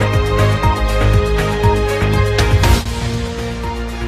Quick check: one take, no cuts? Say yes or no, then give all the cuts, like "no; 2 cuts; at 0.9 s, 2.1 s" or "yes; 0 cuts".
no; 1 cut; at 2.5 s